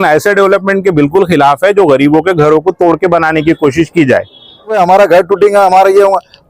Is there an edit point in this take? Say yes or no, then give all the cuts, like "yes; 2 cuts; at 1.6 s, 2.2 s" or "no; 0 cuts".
yes; 1 cut; at 4.7 s